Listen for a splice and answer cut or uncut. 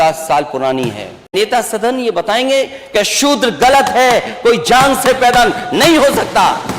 cut